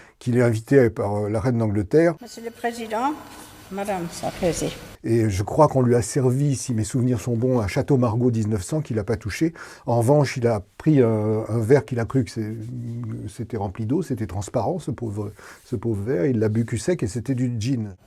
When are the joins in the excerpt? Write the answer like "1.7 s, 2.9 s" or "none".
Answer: none